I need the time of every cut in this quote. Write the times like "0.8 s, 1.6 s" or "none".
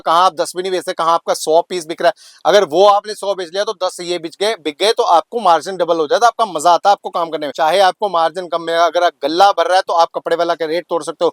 7.5 s